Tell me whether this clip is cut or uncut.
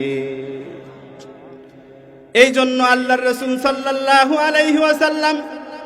cut